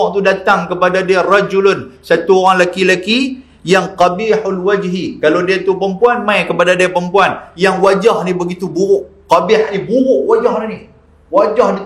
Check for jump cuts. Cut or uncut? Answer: uncut